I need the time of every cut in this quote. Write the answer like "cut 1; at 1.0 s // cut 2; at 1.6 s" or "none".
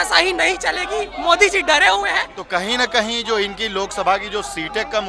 cut 1; at 2.3 s